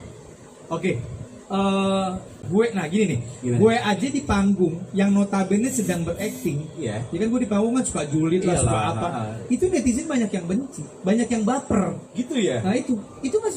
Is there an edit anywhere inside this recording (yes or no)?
yes